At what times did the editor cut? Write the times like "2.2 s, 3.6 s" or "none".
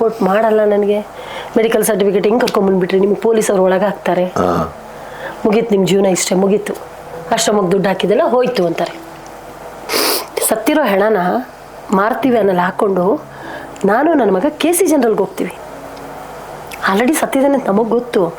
9.8 s, 15.6 s